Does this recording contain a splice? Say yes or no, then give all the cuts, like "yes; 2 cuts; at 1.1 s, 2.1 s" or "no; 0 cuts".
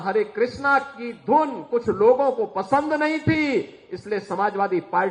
no; 0 cuts